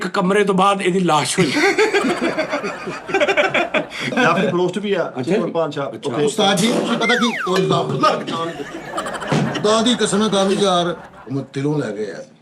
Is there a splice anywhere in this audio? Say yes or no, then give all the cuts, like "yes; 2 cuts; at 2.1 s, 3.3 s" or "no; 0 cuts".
yes; 2 cuts; at 4.1 s, 11.0 s